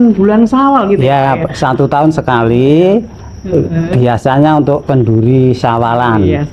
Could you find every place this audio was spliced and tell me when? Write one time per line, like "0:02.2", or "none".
none